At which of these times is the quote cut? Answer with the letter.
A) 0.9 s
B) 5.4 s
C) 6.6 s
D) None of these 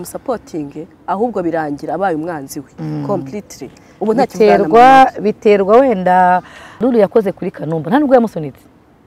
C